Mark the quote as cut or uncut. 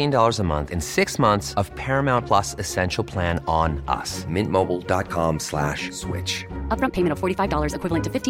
uncut